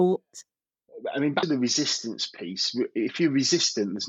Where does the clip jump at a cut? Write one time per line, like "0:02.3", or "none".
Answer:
none